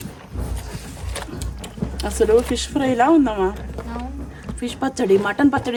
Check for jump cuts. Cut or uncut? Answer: uncut